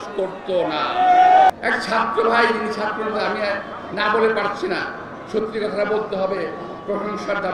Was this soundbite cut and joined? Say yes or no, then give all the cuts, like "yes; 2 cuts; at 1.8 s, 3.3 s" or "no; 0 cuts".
yes; 1 cut; at 1.5 s